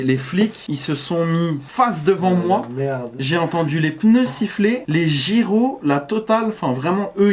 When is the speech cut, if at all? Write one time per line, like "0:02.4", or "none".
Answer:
none